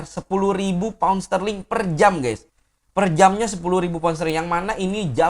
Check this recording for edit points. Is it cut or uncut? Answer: uncut